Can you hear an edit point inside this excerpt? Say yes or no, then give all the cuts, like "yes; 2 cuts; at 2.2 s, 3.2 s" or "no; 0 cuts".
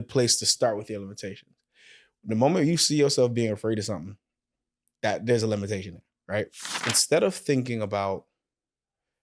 yes; 1 cut; at 6.7 s